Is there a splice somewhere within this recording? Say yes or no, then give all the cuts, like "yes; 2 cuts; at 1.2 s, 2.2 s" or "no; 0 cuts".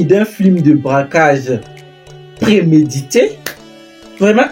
no; 0 cuts